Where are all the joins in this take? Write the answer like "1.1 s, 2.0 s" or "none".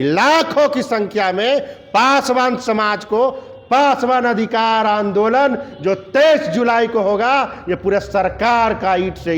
none